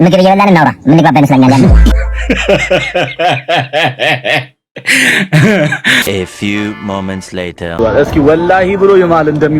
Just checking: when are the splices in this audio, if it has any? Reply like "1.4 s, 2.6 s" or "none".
6.1 s